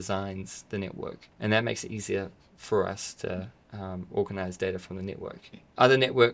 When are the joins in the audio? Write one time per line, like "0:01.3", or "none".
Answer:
0:01.3